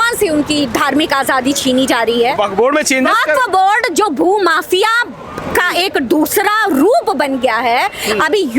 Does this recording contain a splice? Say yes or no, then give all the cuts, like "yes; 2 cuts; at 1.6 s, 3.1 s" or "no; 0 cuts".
no; 0 cuts